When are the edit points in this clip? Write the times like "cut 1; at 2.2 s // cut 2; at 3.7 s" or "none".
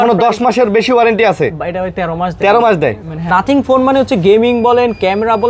cut 1; at 3.3 s